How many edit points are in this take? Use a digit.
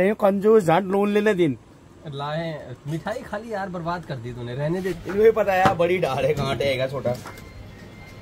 1